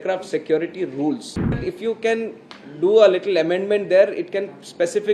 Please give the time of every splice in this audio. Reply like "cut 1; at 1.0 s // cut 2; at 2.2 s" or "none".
cut 1; at 1.7 s